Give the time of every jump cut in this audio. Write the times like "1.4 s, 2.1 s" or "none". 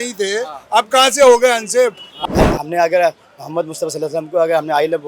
2.1 s

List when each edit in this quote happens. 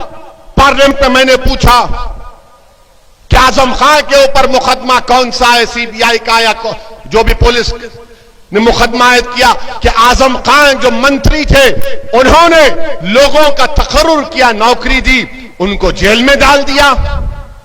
0.9 s

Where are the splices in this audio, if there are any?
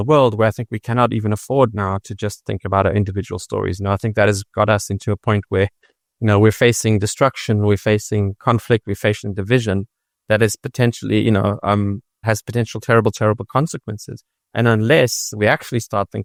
none

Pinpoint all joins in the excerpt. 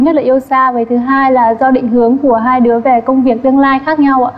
none

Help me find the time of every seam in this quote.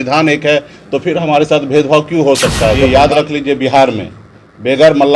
2.8 s

